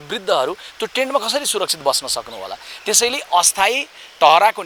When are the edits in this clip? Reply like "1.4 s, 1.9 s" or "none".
none